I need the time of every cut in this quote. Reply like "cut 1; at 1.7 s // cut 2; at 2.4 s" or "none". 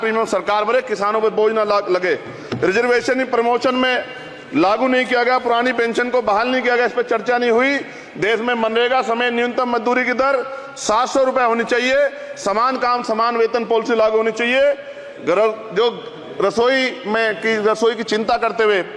none